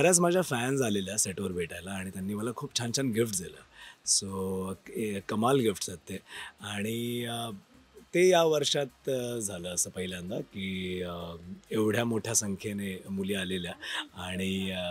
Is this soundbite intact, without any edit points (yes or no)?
yes